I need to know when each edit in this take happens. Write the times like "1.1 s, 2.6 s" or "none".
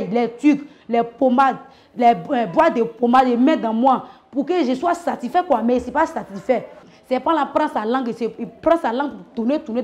6.9 s